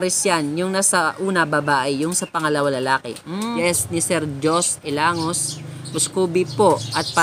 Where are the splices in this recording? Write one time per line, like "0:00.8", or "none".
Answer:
0:03.4

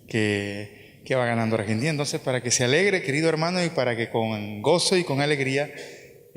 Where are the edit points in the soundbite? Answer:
0:04.3

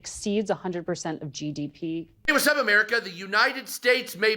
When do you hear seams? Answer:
0:02.1

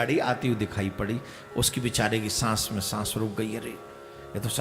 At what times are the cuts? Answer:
none

